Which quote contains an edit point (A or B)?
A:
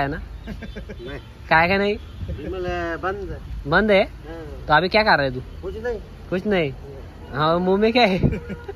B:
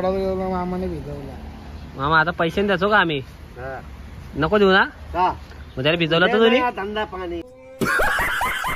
B